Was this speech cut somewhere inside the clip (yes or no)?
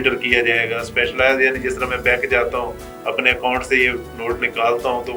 no